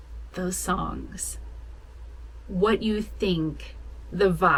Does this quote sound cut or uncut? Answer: uncut